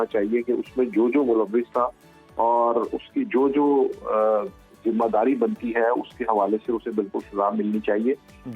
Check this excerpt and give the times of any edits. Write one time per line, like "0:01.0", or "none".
none

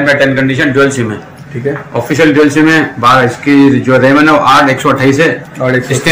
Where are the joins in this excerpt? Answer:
none

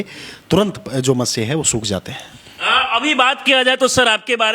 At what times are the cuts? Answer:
none

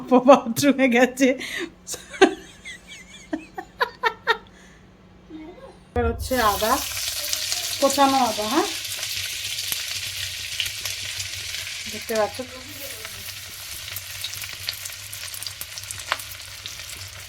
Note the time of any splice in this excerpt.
0:06.0

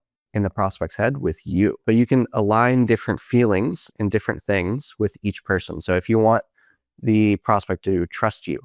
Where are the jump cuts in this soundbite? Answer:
0:01.8

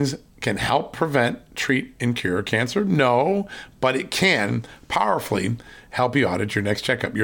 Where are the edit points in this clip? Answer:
none

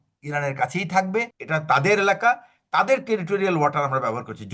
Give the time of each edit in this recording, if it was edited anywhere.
0:01.4

